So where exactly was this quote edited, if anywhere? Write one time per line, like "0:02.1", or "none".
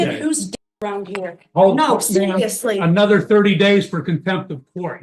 none